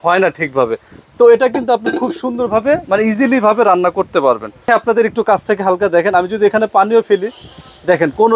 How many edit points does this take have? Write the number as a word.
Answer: one